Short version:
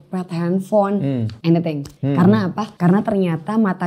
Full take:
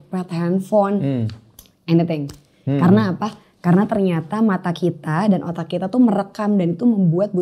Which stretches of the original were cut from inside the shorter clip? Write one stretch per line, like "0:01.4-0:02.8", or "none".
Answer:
0:01.3-0:01.8
0:02.3-0:02.5
0:03.3-0:03.5